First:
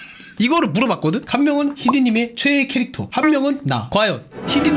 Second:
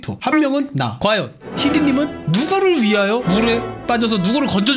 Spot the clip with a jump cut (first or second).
first